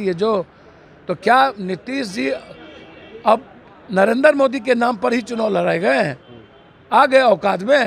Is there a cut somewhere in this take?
no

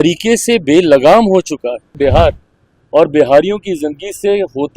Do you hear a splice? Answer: yes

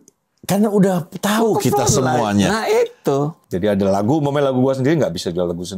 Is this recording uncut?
no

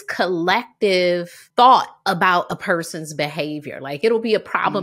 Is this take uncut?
no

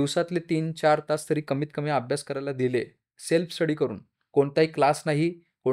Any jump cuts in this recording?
no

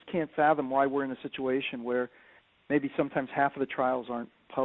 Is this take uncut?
yes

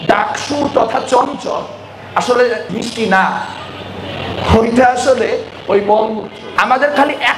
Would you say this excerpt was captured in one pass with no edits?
no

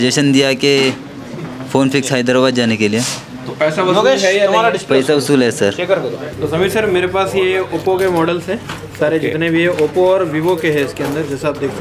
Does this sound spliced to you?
yes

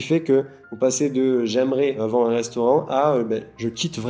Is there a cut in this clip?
yes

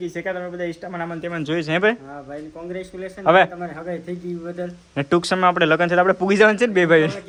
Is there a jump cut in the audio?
no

